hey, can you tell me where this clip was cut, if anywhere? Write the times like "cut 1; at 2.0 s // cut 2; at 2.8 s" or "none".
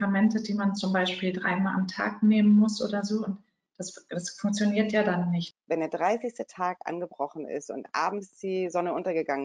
cut 1; at 5.5 s